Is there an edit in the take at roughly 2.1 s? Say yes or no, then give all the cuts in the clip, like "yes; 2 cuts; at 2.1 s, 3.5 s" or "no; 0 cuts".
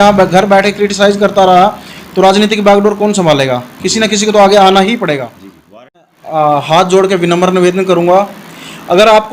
no; 1 cut; at 6.0 s